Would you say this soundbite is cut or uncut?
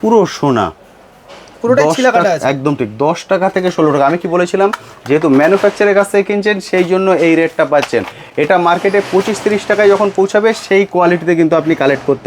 uncut